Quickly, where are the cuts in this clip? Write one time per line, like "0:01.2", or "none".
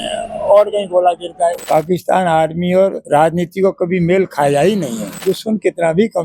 0:01.6
0:05.1